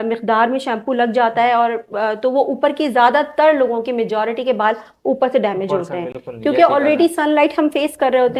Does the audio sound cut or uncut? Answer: uncut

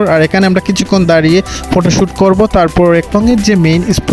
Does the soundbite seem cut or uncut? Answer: cut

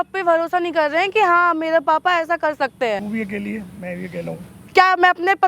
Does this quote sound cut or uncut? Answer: cut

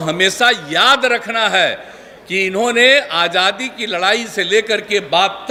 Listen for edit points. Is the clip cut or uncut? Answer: uncut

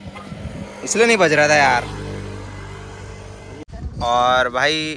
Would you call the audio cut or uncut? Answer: cut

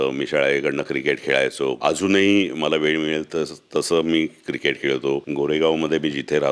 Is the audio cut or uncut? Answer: cut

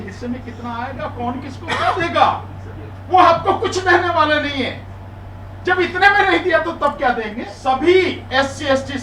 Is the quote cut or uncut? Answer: cut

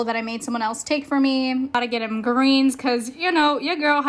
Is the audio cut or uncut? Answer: cut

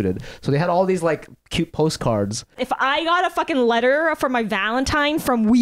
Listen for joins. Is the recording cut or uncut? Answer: cut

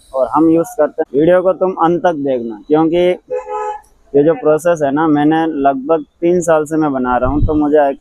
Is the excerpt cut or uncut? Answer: cut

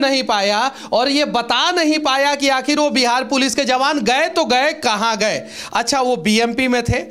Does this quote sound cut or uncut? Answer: uncut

